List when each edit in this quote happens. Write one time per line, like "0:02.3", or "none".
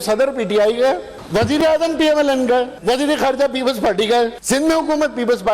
0:01.1
0:02.7
0:04.4